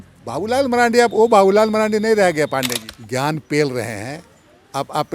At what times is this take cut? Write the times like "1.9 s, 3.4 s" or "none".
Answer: 2.8 s